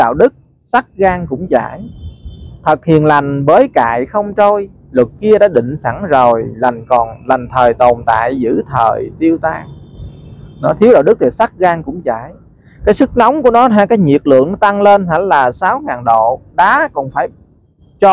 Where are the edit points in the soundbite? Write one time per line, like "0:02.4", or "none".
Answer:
none